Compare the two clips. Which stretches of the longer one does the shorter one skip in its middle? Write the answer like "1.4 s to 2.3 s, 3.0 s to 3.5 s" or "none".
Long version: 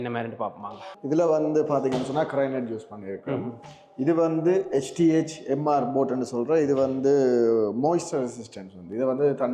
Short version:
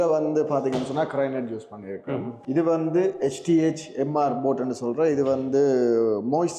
3.5 s to 3.9 s